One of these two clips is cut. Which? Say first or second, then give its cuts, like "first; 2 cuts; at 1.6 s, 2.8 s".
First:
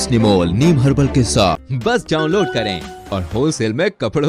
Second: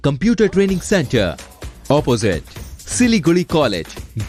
first; 1 cut; at 1.6 s